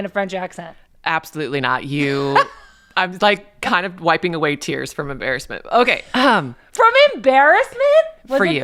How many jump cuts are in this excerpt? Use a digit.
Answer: 0